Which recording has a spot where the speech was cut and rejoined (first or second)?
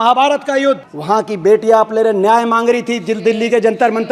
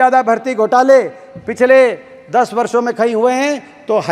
first